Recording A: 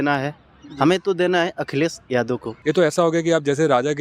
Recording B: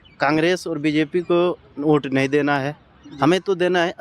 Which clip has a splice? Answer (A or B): A